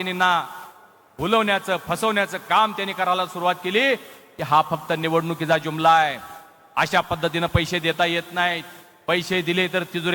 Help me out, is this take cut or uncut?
uncut